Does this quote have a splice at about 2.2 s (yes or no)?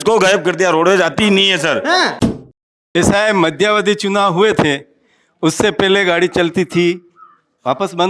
yes